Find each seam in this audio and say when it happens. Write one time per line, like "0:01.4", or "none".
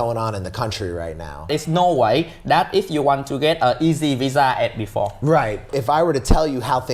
0:01.4
0:05.7